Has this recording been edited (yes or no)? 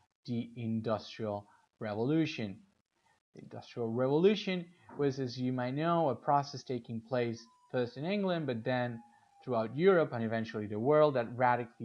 yes